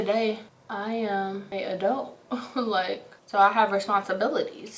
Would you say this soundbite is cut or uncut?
cut